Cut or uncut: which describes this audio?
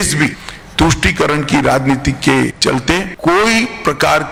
uncut